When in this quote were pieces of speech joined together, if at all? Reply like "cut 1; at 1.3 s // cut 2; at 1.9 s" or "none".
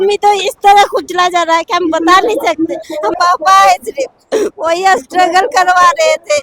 cut 1; at 3.1 s